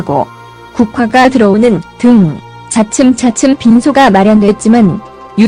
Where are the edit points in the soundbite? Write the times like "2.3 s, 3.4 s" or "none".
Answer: none